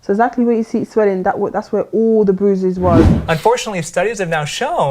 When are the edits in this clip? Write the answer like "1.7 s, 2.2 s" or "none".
3.3 s

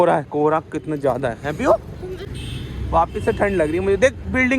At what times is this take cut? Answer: 2.2 s

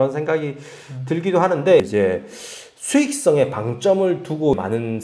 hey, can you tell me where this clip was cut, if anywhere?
1.8 s

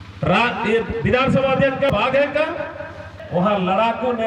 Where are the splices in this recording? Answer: 1.9 s, 3.1 s

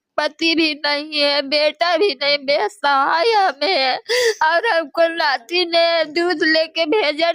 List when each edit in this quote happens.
none

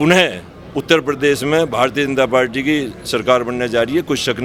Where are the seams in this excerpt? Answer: none

